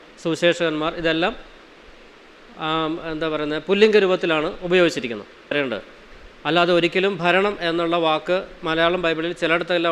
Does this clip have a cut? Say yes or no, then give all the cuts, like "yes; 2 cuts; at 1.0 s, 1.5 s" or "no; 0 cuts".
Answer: yes; 1 cut; at 5.5 s